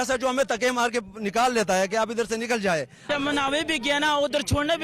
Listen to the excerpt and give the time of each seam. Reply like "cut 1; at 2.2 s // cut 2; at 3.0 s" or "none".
cut 1; at 3.1 s